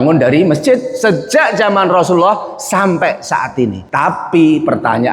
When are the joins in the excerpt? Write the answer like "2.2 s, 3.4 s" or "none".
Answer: 3.8 s